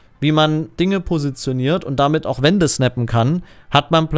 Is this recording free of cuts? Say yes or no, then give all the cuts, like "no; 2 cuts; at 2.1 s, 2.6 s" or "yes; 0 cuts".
yes; 0 cuts